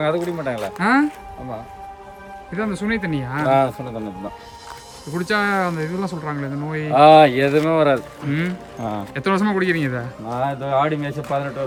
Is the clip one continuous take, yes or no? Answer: yes